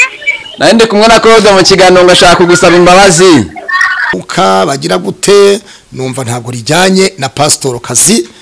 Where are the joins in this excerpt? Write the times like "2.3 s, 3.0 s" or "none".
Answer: 4.1 s